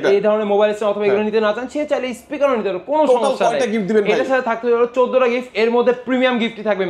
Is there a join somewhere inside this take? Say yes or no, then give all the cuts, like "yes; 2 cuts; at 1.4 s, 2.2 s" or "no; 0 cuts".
no; 0 cuts